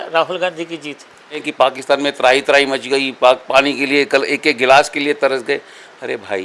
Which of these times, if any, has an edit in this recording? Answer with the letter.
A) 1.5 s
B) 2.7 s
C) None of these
A